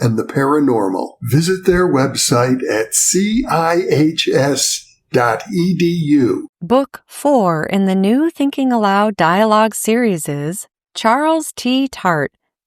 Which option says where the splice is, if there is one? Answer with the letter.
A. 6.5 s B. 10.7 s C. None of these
A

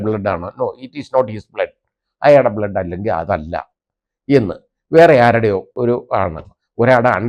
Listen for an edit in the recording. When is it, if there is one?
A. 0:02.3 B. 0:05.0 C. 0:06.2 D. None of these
D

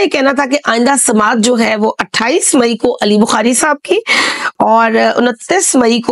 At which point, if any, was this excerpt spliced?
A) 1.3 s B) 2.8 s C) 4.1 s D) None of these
D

